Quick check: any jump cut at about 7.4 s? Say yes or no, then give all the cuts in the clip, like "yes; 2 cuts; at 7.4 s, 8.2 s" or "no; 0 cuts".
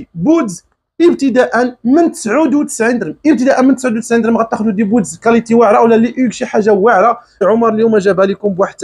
yes; 1 cut; at 7.4 s